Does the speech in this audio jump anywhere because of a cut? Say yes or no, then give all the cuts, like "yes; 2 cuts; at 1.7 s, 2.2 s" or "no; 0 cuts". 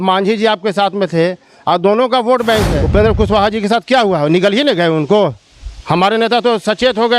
yes; 1 cut; at 2.8 s